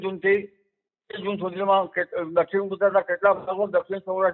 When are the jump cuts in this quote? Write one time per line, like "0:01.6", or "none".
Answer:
none